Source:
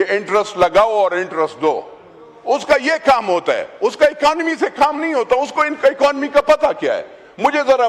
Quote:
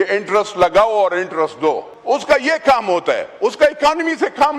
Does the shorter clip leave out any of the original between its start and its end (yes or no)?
yes